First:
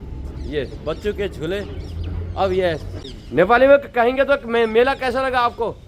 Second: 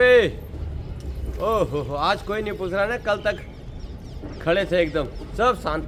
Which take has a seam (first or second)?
first